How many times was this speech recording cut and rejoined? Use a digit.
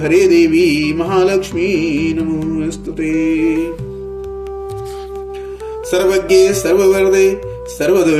2